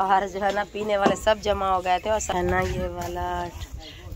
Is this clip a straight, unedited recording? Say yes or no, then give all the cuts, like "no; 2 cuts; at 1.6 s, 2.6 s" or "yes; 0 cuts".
no; 1 cut; at 2.3 s